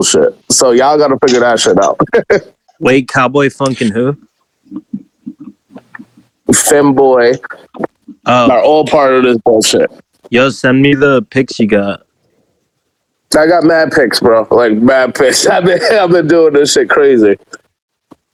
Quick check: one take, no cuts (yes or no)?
yes